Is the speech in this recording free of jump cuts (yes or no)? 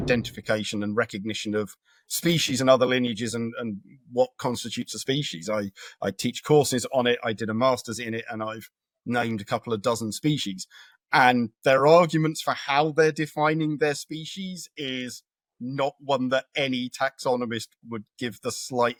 yes